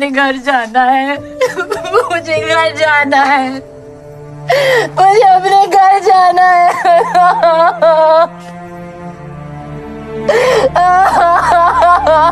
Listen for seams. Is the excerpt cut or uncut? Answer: uncut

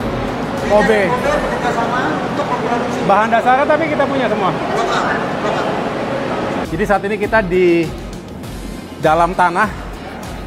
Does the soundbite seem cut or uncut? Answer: cut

